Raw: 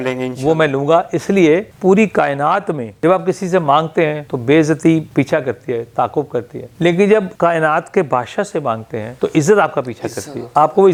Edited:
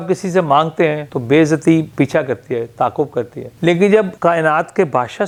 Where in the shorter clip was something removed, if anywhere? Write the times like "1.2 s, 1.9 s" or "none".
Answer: none